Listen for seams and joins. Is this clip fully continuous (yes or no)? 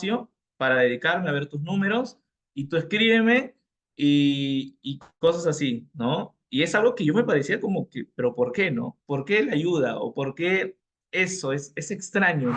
yes